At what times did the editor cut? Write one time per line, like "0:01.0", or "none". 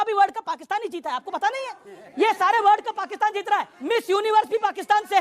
none

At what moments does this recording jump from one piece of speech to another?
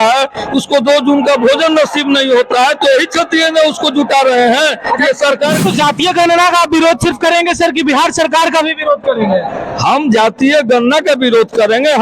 0:05.6

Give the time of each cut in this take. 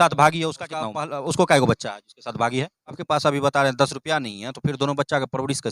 0:00.8
0:03.0

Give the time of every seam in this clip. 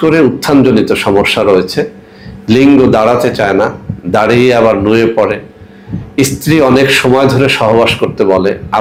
none

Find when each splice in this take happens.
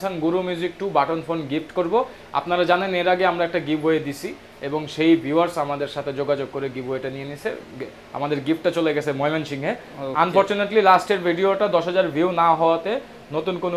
none

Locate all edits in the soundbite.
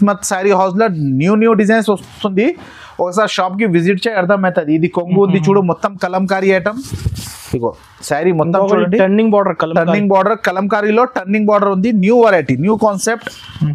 none

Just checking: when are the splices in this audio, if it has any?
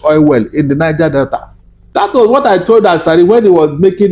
0:02.1

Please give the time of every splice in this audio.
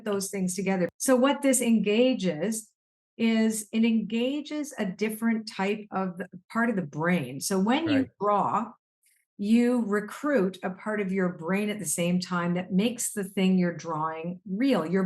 0:00.9

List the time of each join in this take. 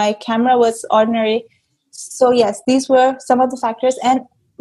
none

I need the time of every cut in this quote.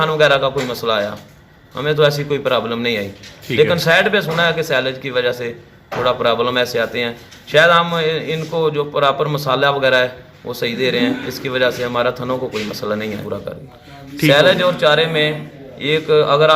0:13.2

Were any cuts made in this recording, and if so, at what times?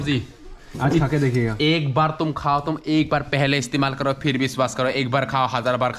none

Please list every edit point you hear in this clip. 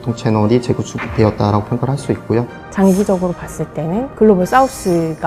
0:02.6

